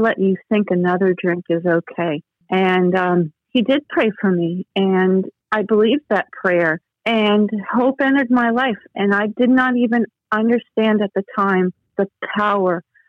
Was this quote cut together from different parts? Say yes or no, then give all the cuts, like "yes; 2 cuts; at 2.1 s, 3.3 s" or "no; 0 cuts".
yes; 3 cuts; at 2.3 s, 5.4 s, 6.9 s